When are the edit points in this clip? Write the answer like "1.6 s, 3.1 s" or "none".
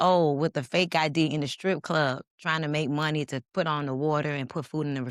none